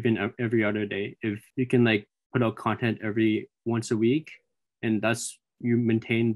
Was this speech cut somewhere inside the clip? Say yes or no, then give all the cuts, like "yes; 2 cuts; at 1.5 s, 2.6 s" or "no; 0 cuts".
yes; 1 cut; at 1.4 s